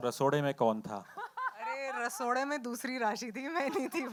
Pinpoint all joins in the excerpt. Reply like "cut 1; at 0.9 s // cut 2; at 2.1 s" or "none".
none